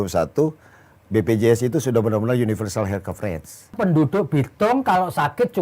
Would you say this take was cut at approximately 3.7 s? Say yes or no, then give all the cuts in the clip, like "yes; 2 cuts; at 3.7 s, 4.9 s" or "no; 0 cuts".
yes; 1 cut; at 3.7 s